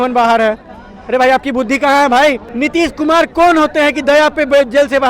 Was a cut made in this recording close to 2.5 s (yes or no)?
yes